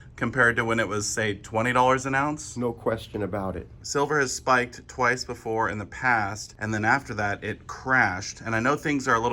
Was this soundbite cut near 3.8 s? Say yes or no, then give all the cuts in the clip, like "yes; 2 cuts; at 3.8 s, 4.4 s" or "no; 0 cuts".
yes; 2 cuts; at 3.8 s, 6.5 s